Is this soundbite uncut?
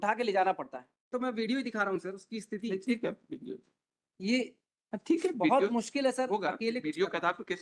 no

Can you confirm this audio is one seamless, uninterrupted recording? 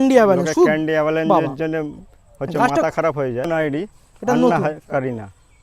no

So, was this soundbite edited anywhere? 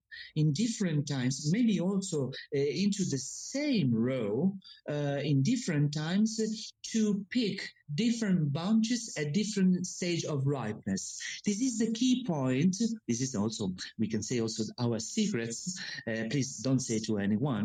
no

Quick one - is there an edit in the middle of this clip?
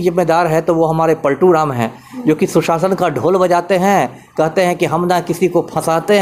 no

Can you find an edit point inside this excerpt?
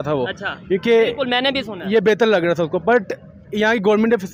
no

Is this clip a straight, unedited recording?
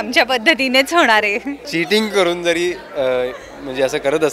no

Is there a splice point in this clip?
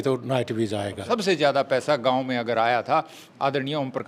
yes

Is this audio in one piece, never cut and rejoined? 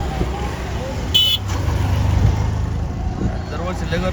yes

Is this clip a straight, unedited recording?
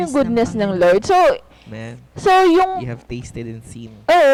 yes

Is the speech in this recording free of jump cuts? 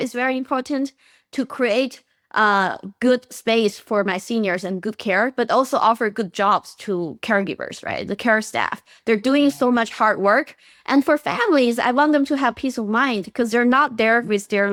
yes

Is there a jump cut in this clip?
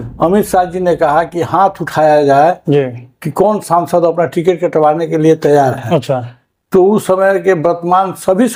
no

